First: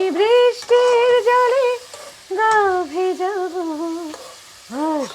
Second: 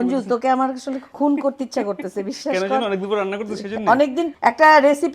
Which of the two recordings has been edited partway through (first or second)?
second